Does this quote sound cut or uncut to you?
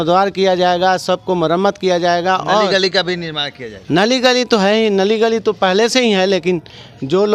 uncut